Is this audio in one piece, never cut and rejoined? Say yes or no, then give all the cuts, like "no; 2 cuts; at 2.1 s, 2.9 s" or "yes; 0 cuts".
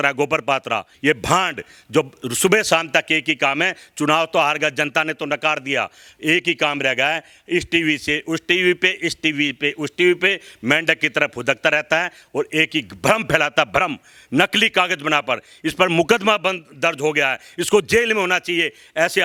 yes; 0 cuts